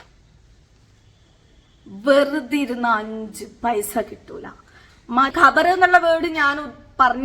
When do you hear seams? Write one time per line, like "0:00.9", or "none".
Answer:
0:05.3